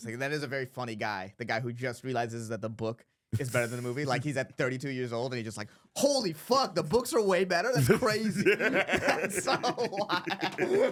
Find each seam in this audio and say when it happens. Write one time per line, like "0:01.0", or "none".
none